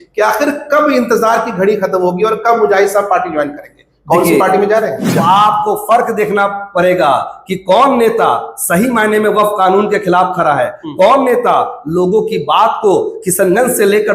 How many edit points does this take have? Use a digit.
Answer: 1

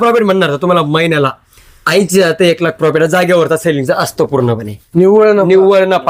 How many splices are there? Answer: 0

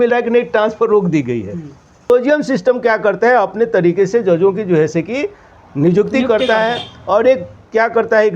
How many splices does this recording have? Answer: 1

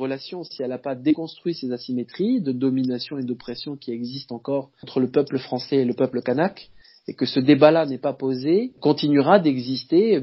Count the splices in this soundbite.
2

